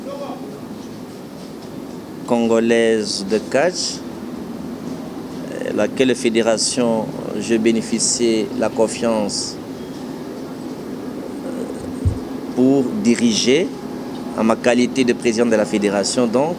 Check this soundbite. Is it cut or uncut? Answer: uncut